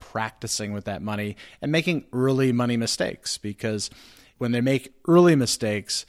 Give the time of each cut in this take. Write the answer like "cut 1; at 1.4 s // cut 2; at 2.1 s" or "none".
none